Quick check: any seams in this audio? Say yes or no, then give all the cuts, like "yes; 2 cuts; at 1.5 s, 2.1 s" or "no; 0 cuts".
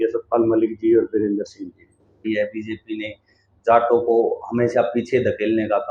yes; 1 cut; at 2.2 s